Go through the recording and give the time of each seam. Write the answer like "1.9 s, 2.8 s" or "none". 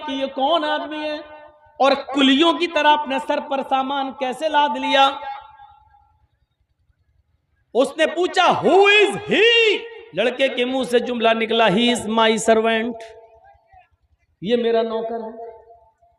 10.0 s